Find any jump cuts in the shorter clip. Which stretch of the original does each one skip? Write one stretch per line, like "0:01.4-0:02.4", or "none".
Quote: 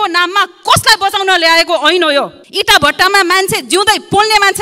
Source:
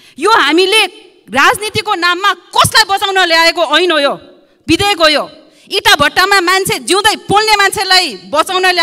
0:04.3-0:05.6